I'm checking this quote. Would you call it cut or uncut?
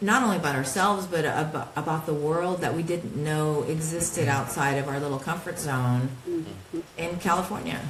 uncut